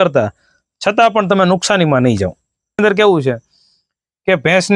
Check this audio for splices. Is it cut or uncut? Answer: cut